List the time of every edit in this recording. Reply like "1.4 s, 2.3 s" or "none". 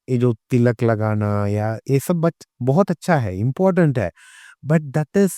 none